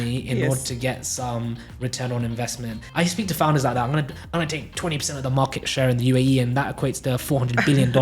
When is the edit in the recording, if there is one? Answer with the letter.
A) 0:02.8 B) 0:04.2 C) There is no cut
A